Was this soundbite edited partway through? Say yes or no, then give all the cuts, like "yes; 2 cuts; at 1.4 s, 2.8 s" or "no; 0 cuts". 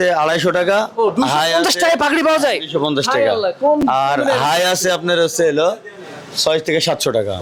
no; 0 cuts